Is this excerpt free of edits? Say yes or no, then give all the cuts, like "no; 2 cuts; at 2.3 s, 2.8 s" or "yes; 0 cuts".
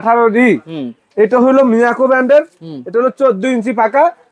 yes; 0 cuts